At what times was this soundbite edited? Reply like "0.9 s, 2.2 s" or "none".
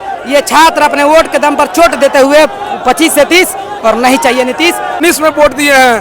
5.0 s